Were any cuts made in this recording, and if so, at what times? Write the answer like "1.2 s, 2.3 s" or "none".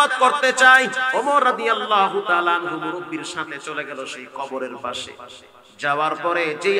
1.0 s